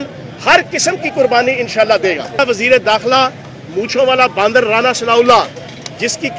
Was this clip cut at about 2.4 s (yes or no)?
yes